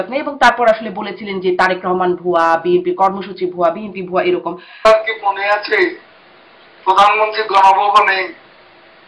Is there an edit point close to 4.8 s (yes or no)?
yes